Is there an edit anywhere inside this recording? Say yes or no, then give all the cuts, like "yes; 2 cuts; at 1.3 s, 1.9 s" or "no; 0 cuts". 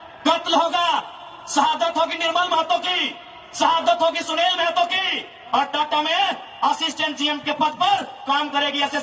no; 0 cuts